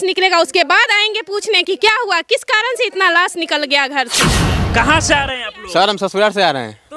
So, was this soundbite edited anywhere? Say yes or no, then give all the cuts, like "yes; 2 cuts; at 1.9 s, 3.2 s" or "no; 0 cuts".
yes; 1 cut; at 4.6 s